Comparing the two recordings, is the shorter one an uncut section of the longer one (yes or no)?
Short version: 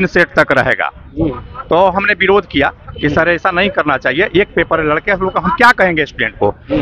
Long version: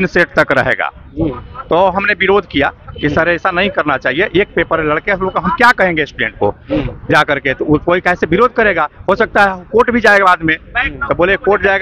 yes